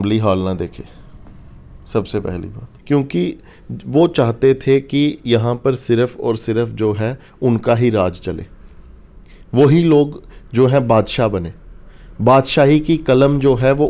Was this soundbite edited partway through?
yes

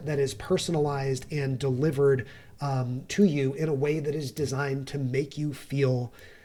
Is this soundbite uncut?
yes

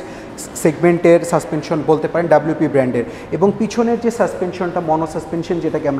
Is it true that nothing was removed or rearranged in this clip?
yes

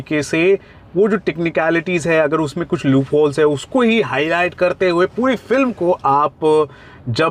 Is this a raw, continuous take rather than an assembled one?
yes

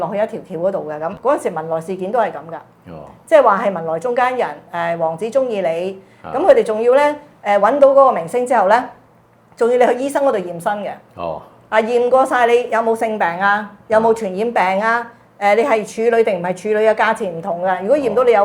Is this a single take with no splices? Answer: no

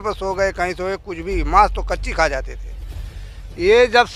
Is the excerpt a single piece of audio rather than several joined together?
yes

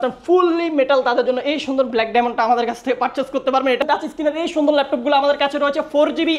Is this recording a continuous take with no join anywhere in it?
no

